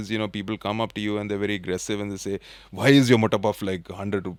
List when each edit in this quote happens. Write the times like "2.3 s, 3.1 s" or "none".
none